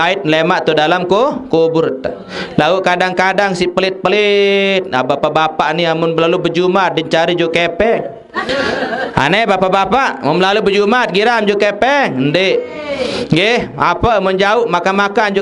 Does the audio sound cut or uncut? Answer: uncut